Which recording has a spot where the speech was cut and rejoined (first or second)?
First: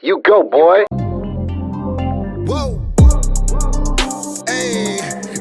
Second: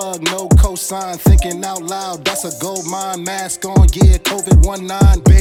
first